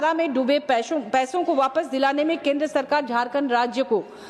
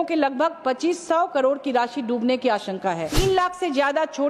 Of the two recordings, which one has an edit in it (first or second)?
second